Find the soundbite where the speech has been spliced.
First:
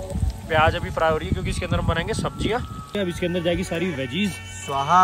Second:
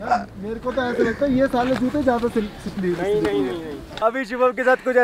second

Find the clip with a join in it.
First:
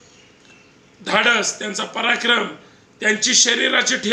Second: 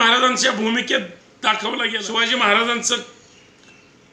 second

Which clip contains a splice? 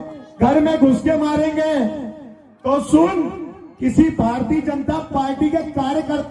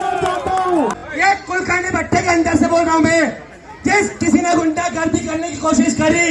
second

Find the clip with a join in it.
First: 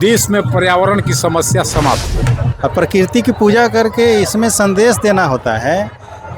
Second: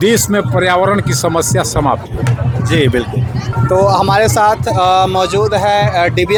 first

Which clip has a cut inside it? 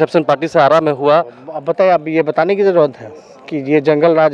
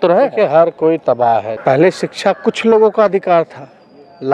second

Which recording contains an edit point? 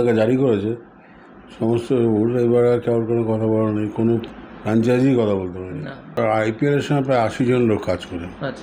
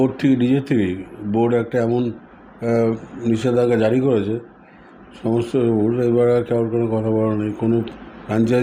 first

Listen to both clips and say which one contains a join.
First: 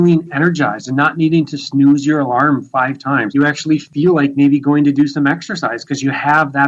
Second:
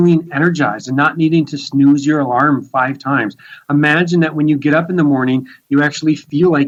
first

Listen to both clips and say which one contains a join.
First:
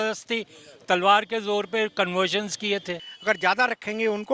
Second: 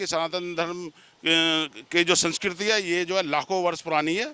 first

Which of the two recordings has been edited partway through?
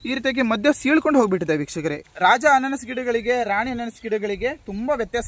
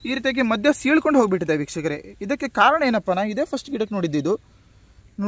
first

